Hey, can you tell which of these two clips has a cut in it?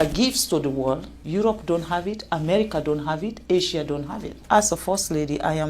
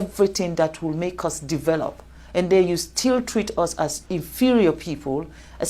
first; 2 cuts; at 1.1 s, 4.4 s

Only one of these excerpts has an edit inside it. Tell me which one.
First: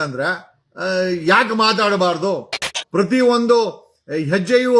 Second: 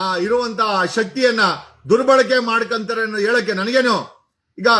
first; 1 cut; at 2.8 s

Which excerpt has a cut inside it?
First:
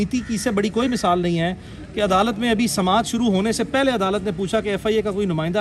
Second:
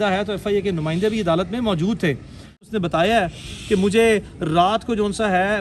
second; 1 cut; at 2.7 s

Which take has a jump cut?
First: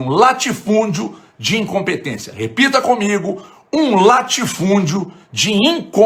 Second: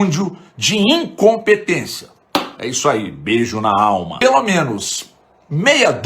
second; 1 cut; at 4.1 s

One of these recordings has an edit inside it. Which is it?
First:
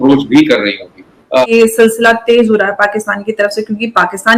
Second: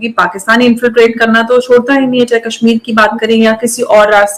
first; 1 cut; at 1.4 s

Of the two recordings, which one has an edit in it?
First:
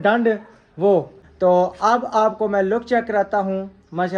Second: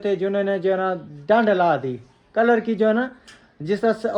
first; 1 cut; at 1.2 s

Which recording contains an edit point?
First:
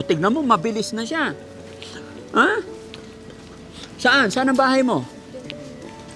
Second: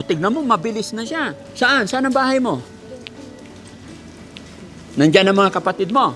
second; 1 cut; at 1.4 s

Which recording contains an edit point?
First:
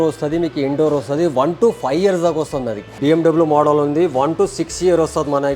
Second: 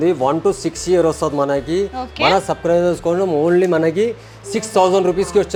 first; 1 cut; at 2.9 s

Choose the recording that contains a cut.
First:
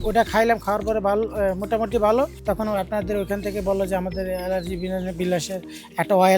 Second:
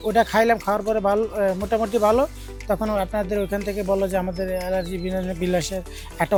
first; 1 cut; at 2.4 s

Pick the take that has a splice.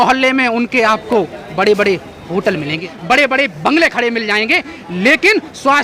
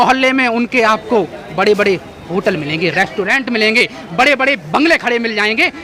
first; 1 cut; at 2.9 s

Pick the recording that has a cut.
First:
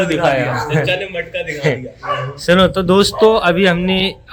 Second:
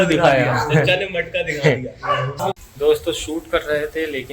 second; 1 cut; at 2.3 s

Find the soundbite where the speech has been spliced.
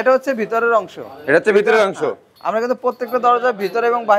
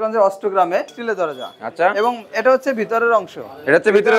second; 1 cut; at 0.9 s

